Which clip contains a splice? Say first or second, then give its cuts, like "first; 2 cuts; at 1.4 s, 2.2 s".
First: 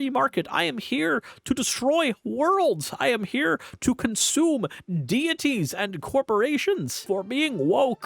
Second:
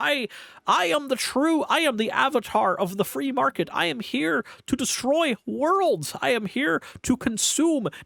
first; 1 cut; at 6.9 s